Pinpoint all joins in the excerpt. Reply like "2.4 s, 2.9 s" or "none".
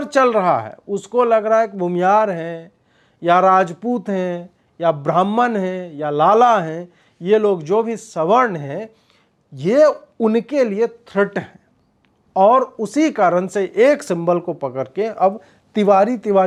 none